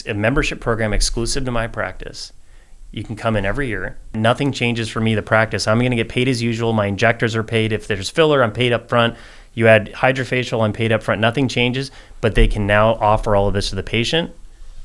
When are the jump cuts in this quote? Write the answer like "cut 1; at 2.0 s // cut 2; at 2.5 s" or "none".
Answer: cut 1; at 4.1 s